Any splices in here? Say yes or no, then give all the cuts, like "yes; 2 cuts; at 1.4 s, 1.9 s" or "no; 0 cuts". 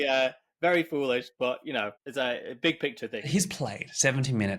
yes; 2 cuts; at 2.0 s, 3.2 s